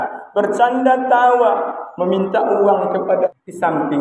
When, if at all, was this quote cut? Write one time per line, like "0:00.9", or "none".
0:03.0